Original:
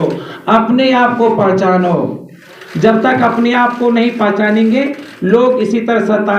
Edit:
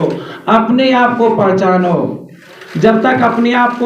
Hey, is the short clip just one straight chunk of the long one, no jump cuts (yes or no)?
yes